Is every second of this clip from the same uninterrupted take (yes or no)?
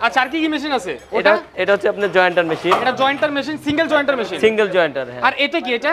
yes